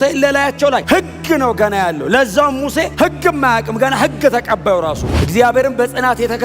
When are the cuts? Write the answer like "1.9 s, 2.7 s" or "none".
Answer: 5.2 s